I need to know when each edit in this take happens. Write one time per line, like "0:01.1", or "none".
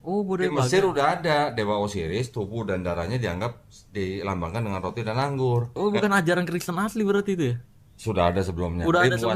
none